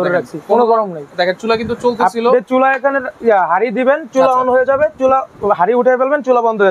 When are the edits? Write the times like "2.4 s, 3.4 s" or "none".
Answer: none